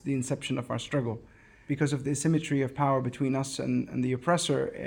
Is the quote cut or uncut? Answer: cut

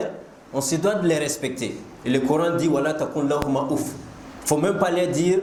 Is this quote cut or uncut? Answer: uncut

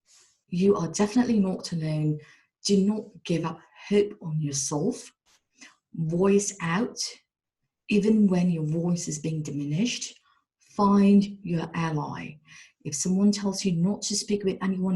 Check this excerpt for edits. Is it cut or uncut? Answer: uncut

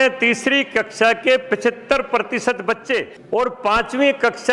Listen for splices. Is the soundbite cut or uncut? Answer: cut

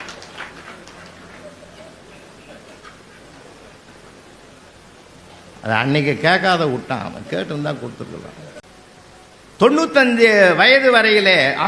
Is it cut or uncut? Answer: cut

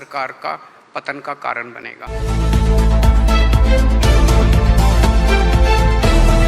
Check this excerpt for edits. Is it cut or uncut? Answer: cut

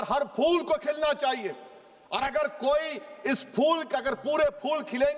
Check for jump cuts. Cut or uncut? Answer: uncut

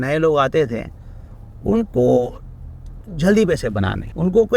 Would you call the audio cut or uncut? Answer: uncut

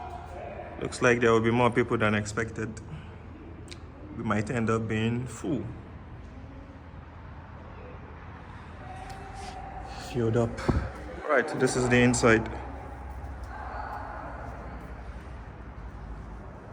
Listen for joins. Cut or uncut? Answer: uncut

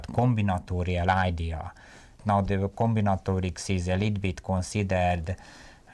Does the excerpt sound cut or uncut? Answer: cut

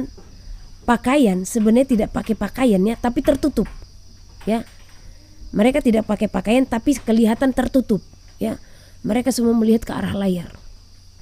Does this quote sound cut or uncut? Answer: uncut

